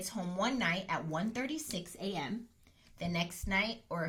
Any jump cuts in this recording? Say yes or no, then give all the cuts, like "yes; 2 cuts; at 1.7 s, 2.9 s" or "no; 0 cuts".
no; 0 cuts